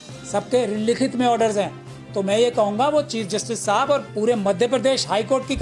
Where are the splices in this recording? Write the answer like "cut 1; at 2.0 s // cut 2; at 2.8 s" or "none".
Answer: cut 1; at 4.1 s